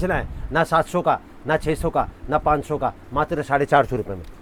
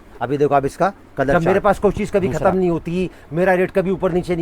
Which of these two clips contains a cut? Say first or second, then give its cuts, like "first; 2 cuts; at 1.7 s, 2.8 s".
second; 1 cut; at 1.3 s